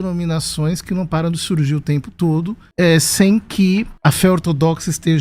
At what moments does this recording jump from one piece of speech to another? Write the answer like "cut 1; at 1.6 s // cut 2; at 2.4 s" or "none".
cut 1; at 2.6 s // cut 2; at 3.9 s